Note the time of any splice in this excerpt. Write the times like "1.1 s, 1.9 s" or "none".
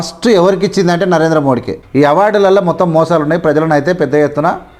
1.7 s